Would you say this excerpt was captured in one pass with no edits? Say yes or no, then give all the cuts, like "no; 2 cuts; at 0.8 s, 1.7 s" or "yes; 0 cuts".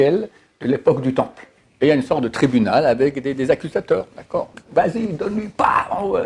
no; 2 cuts; at 1.2 s, 4.6 s